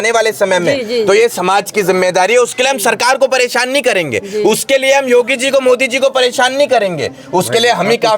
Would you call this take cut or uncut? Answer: uncut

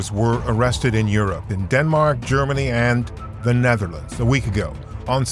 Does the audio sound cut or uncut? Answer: uncut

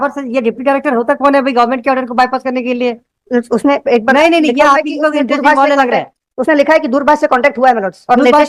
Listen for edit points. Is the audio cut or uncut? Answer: uncut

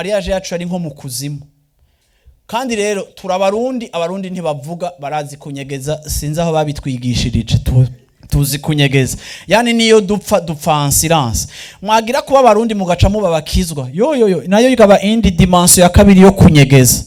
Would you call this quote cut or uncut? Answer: uncut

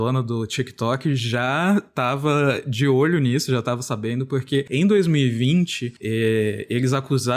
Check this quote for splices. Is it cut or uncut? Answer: uncut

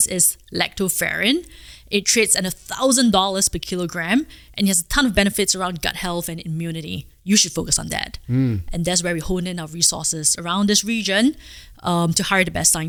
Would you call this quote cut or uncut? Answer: uncut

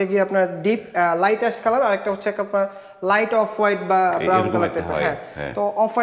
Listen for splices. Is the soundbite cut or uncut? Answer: uncut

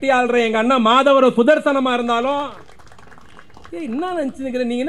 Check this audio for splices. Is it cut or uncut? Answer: uncut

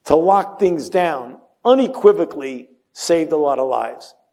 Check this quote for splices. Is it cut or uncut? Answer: uncut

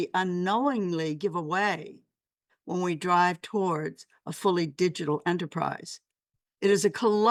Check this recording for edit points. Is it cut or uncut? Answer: uncut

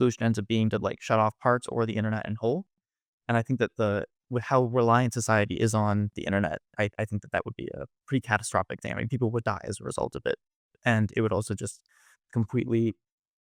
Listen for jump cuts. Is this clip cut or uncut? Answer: uncut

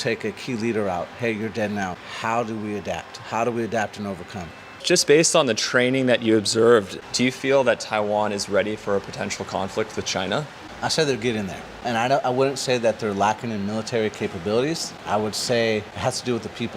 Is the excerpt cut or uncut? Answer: cut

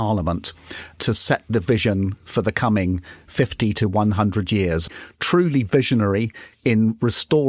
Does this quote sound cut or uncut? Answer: cut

